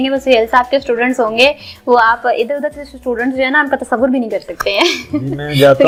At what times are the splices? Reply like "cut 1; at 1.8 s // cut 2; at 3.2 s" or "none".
none

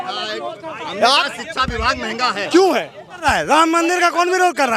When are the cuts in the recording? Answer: cut 1; at 3.2 s

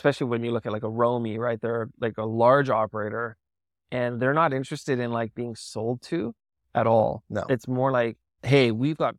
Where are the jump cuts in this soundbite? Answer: cut 1; at 8.3 s

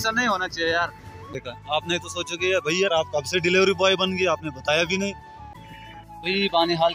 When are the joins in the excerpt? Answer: cut 1; at 1.3 s // cut 2; at 5.3 s

